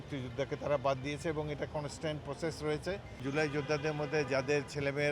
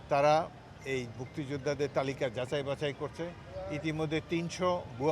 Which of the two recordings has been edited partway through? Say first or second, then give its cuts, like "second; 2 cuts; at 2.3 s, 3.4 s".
first; 1 cut; at 3.2 s